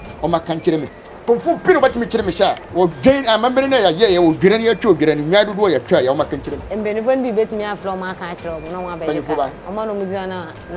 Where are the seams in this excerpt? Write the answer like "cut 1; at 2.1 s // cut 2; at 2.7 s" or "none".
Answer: cut 1; at 1.0 s // cut 2; at 2.6 s // cut 3; at 6.6 s // cut 4; at 9.6 s